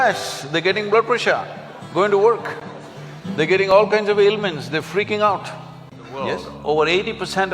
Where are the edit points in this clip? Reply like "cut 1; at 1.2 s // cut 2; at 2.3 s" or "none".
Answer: cut 1; at 6.5 s